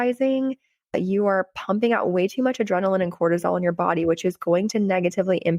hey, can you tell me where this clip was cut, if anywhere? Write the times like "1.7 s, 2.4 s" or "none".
0.9 s